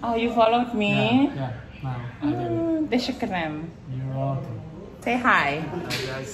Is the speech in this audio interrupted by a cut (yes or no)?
yes